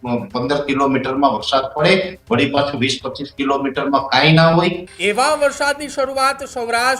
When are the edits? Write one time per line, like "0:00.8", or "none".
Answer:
0:04.9